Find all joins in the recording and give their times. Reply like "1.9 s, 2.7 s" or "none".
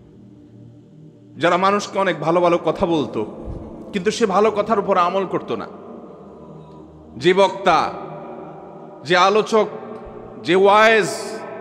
1.0 s